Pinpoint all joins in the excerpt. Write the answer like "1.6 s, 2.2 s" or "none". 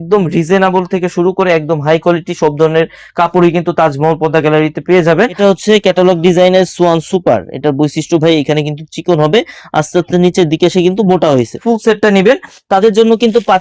5.3 s, 11.6 s